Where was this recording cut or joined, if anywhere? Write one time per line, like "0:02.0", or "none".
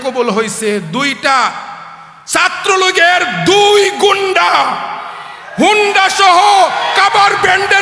none